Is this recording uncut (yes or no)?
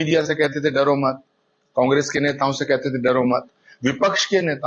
yes